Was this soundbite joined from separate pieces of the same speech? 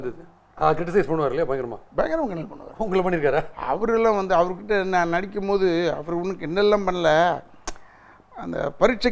no; 0 cuts

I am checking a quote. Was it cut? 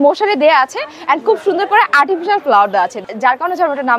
yes; 1 cut; at 3.0 s

